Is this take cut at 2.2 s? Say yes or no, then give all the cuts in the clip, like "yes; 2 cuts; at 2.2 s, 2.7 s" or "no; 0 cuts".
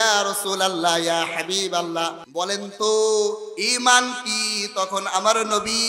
yes; 1 cut; at 2.2 s